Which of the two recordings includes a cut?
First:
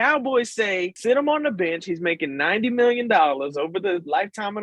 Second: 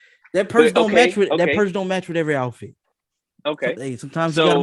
first; 1 cut; at 1.0 s

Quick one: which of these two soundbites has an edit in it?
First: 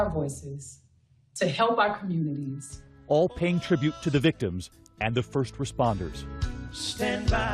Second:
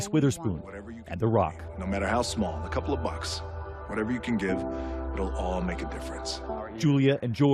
second; 1 cut; at 3.3 s

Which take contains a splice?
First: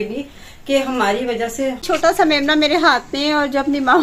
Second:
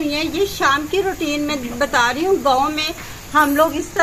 first; 1 cut; at 1.8 s

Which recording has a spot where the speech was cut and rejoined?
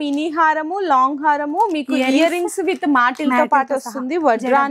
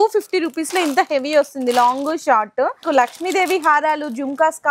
second; 1 cut; at 2.8 s

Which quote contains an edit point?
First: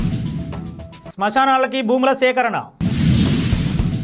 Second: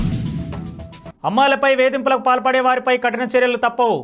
first; 1 cut; at 1.0 s

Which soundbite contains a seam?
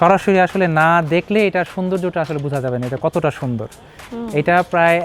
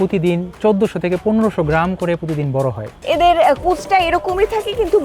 second; 1 cut; at 3.0 s

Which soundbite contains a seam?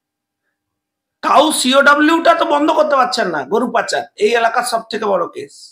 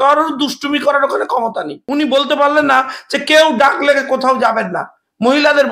second; 1 cut; at 1.7 s

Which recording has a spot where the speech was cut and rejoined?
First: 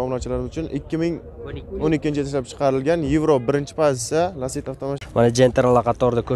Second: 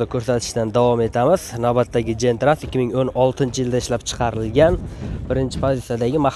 first; 1 cut; at 5.0 s

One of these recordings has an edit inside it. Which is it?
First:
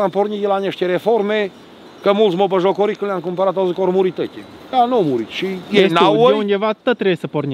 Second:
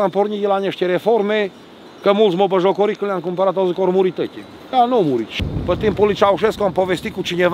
second; 1 cut; at 5.4 s

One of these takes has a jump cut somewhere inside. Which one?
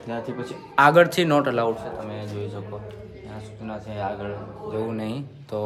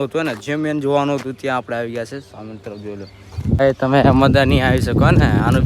second; 1 cut; at 3.6 s

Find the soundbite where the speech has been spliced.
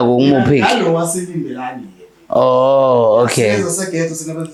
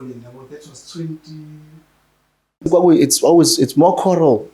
second; 1 cut; at 2.6 s

